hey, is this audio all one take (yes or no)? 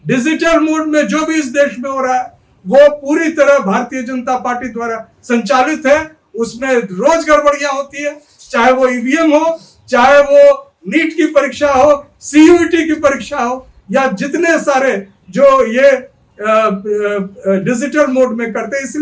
yes